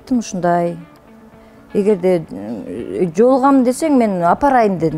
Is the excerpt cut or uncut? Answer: uncut